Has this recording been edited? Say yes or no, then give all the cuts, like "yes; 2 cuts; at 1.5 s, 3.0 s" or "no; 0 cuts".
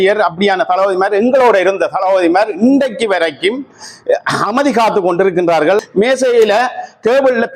yes; 1 cut; at 5.8 s